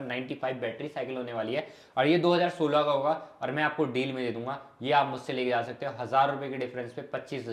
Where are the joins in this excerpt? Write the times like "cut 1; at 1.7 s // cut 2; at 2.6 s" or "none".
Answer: none